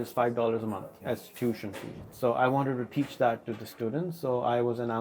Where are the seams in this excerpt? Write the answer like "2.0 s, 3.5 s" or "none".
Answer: 0.9 s, 2.0 s